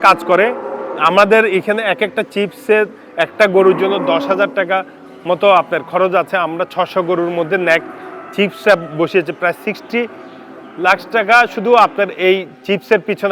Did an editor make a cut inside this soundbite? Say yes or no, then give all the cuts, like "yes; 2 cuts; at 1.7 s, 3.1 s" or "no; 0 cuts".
no; 0 cuts